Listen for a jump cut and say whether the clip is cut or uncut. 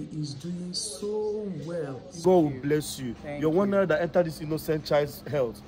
cut